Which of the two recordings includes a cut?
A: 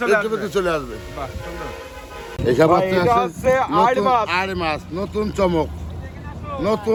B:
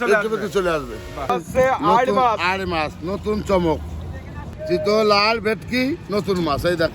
B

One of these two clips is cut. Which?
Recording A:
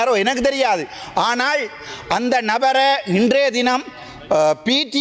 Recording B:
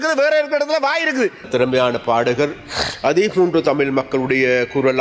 B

